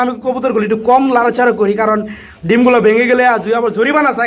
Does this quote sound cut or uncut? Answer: uncut